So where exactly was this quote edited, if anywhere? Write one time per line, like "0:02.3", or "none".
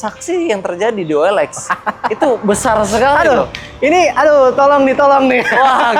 none